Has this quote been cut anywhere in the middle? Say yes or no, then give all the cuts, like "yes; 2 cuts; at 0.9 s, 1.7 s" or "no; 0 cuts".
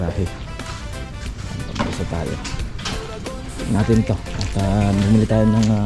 no; 0 cuts